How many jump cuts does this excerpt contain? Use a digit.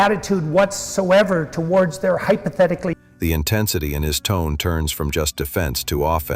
0